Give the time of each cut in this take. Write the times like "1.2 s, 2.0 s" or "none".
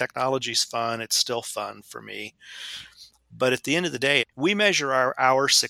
none